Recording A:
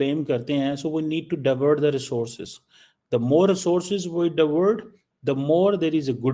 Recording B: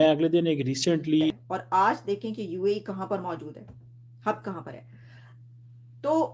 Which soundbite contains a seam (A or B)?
B